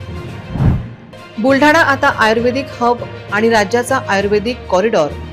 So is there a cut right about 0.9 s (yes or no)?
yes